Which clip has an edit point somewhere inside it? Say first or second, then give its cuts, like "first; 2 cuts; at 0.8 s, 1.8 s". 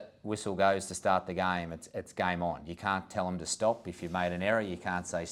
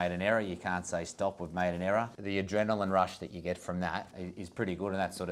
second; 2 cuts; at 2.2 s, 4.2 s